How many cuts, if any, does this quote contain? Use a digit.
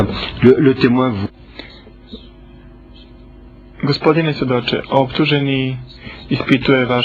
0